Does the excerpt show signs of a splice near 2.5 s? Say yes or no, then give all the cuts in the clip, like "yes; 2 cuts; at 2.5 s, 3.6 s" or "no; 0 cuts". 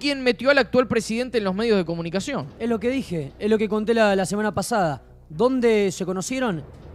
no; 0 cuts